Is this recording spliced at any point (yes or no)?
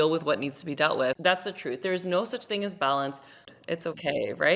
yes